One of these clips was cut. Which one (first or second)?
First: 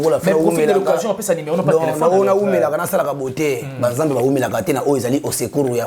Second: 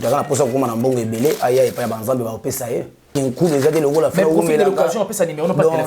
second